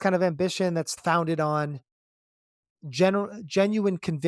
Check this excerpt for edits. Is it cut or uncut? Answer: cut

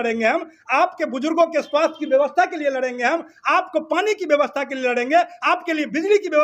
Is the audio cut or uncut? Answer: uncut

